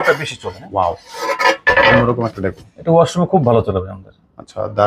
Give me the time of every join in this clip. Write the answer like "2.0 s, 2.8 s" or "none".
none